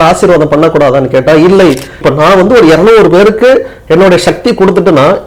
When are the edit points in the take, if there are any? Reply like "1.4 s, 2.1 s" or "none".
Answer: 2.0 s